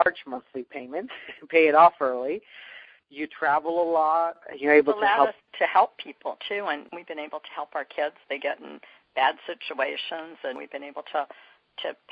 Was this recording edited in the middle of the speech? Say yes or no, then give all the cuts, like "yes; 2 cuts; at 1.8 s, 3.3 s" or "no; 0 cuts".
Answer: no; 0 cuts